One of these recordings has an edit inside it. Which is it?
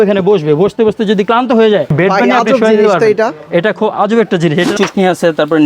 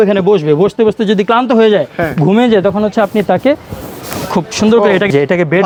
first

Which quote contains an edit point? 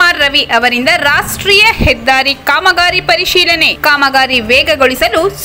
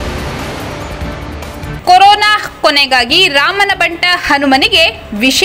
second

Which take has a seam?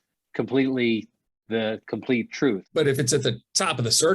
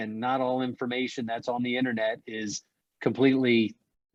first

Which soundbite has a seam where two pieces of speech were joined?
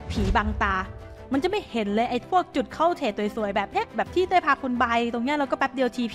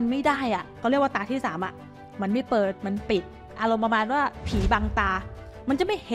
second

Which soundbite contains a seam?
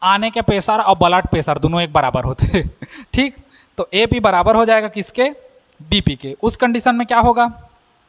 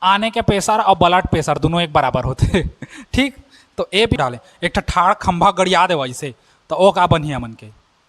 second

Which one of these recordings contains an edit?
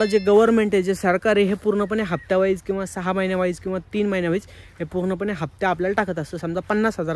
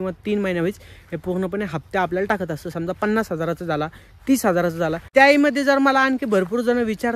second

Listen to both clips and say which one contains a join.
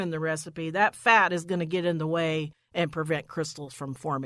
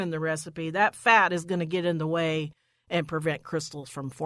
first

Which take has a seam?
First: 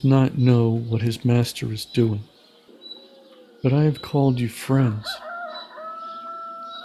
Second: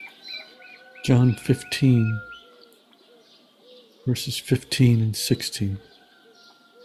second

